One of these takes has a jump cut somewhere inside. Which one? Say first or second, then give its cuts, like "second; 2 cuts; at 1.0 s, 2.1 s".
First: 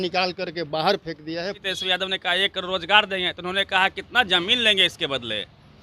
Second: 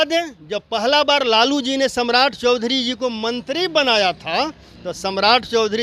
first; 1 cut; at 1.7 s